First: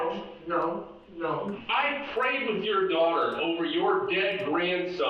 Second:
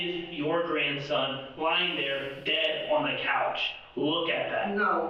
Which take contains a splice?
first; 1 cut; at 1.6 s

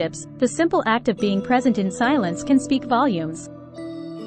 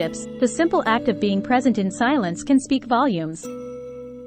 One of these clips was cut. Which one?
second; 1 cut; at 3.4 s

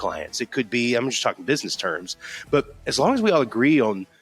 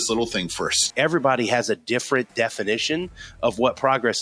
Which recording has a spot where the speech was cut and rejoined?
second; 1 cut; at 0.9 s

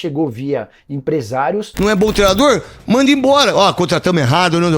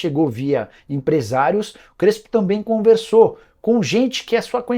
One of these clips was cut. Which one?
first; 1 cut; at 1.7 s

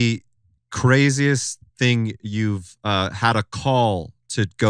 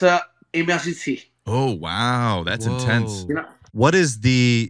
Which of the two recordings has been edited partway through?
second; 1 cut; at 3.6 s

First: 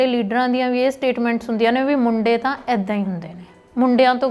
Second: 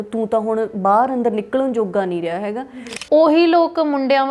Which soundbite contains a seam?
second; 1 cut; at 2.6 s

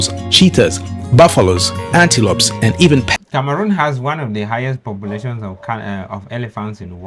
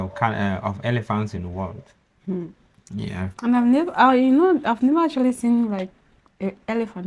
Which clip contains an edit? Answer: first; 1 cut; at 3.2 s

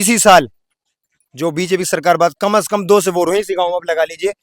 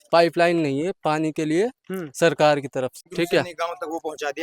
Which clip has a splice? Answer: second; 1 cut; at 3.1 s

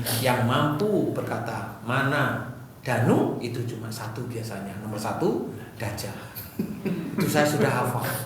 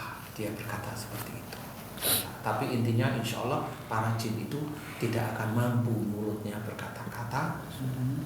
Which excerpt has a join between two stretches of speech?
second; 1 cut; at 2.3 s

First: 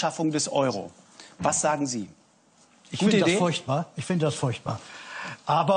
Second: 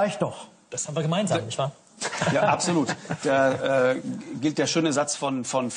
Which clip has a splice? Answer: second; 1 cut; at 2.3 s

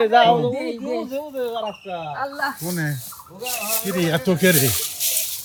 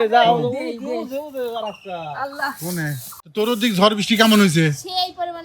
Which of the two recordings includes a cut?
second; 1 cut; at 3.4 s

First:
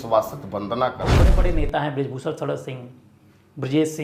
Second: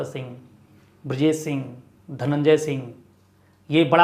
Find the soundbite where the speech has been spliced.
first; 1 cut; at 1.3 s

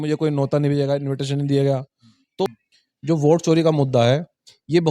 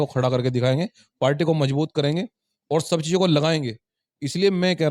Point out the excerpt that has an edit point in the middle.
first; 1 cut; at 2.5 s

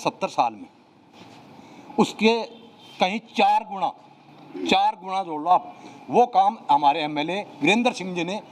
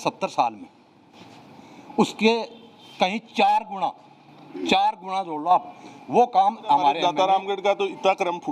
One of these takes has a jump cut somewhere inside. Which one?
second; 1 cut; at 7.0 s

